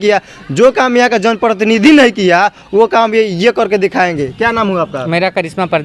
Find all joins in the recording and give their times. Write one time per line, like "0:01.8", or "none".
none